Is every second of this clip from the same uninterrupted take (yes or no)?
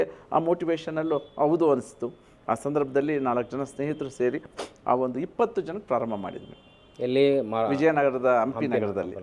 yes